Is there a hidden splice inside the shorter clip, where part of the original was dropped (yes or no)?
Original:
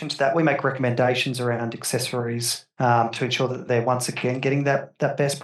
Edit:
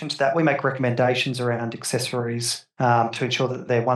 no